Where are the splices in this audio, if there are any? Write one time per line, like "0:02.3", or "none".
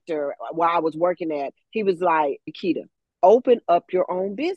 0:02.5